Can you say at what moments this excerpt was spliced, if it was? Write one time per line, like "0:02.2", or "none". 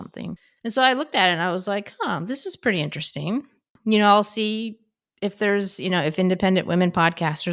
none